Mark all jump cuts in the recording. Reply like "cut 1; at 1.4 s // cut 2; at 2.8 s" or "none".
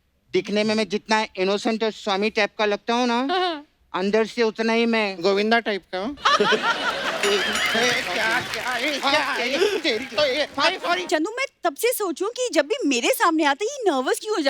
cut 1; at 11.0 s